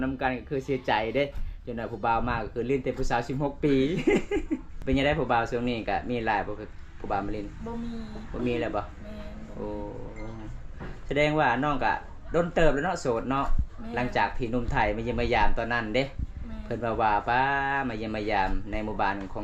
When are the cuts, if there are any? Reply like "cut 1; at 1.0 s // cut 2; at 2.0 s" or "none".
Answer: cut 1; at 4.7 s